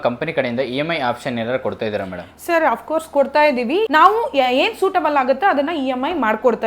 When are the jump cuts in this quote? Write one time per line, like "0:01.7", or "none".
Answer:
0:03.9